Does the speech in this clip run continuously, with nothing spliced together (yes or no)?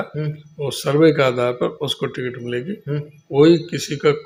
yes